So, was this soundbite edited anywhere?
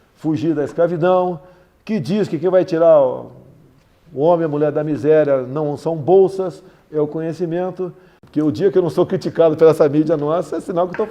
yes; 1 cut; at 8.1 s

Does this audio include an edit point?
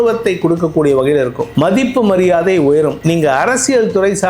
yes; 2 cuts; at 1.4 s, 3.0 s

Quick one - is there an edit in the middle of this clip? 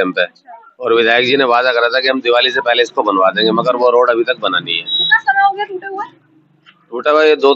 no; 0 cuts

